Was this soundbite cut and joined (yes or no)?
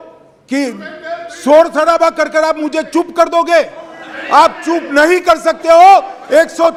no